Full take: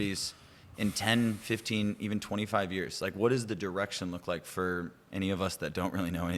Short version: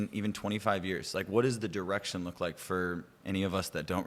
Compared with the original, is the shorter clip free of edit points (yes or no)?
yes